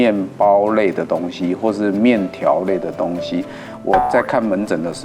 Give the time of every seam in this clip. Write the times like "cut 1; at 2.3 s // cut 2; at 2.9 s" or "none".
none